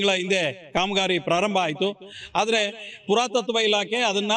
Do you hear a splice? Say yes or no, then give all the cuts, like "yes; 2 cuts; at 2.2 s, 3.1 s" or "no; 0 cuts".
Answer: no; 0 cuts